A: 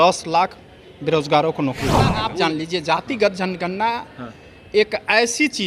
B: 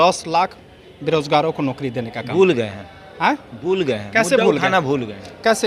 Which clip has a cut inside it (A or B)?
A